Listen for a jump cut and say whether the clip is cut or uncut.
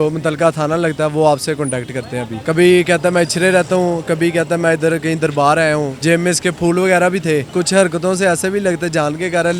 cut